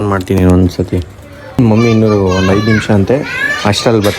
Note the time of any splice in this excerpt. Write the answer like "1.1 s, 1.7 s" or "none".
1.6 s

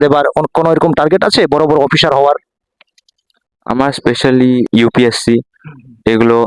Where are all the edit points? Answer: 4.7 s

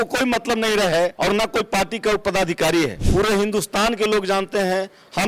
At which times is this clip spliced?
1.2 s, 3.0 s

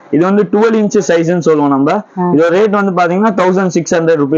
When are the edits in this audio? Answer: none

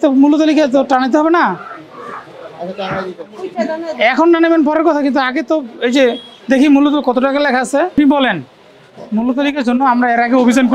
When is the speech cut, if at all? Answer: 7.9 s

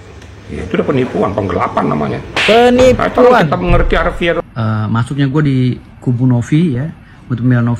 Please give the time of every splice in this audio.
4.4 s

